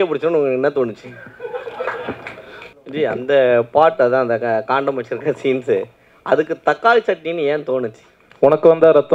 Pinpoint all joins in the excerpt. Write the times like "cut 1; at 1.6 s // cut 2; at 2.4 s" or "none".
cut 1; at 2.7 s